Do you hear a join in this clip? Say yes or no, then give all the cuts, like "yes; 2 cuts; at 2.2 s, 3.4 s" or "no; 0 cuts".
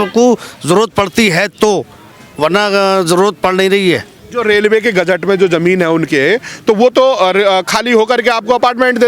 no; 0 cuts